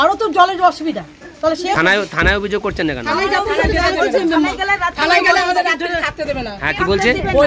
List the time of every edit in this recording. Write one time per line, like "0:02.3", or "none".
0:01.8